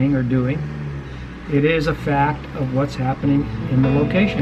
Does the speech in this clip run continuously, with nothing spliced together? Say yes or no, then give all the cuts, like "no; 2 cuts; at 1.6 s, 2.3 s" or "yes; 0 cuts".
yes; 0 cuts